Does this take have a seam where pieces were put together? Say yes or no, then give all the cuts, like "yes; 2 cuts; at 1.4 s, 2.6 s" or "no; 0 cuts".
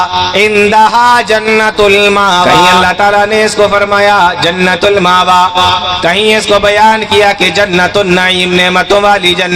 yes; 1 cut; at 2.8 s